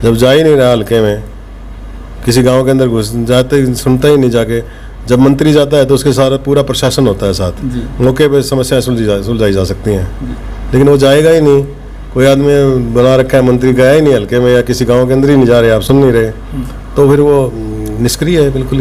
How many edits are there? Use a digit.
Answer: 0